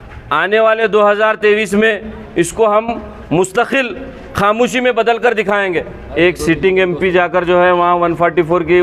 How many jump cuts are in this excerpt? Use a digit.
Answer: 1